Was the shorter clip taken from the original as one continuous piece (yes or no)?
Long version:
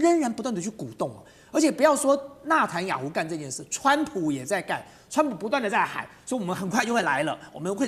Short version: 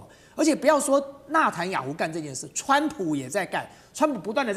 yes